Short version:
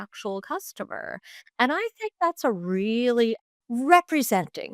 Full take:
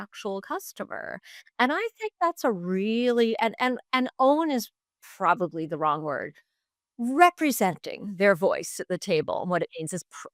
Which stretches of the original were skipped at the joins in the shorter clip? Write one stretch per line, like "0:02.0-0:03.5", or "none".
0:03.4-0:06.6